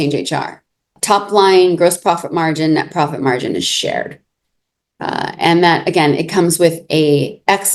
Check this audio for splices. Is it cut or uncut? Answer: cut